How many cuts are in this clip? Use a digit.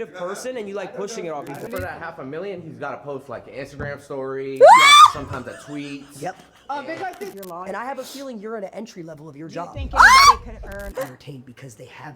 3